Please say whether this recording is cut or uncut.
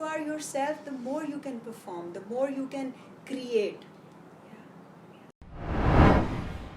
cut